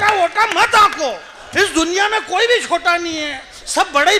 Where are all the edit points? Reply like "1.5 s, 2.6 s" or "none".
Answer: none